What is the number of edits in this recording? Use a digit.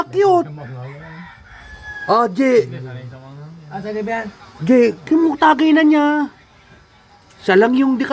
0